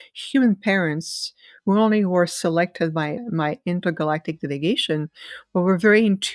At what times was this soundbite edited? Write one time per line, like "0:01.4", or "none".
0:03.2